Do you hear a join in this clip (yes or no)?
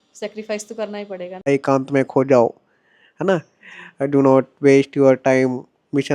yes